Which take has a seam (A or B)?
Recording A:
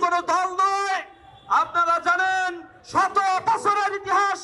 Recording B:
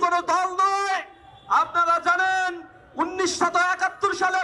A